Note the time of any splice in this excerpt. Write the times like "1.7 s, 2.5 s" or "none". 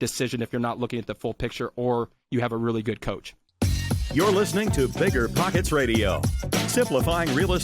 3.4 s